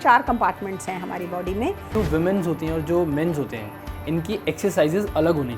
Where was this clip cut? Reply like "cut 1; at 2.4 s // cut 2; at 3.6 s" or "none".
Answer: cut 1; at 1.9 s

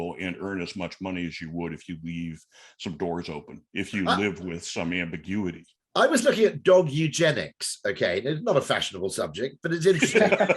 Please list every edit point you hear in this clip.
none

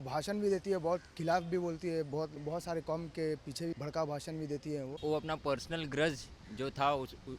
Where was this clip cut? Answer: cut 1; at 2.4 s // cut 2; at 3.7 s // cut 3; at 4.9 s

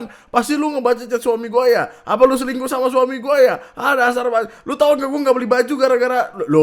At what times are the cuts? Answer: none

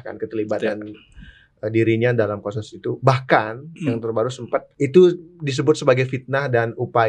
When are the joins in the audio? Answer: cut 1; at 4.7 s

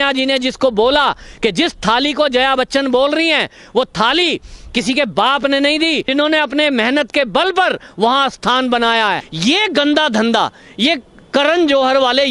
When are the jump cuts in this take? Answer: cut 1; at 6.1 s // cut 2; at 9.3 s

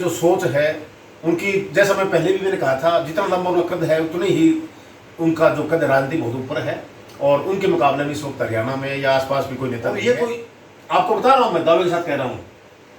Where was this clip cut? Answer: cut 1; at 9.9 s

